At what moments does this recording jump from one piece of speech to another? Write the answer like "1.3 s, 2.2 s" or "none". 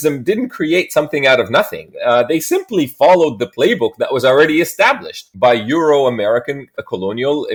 none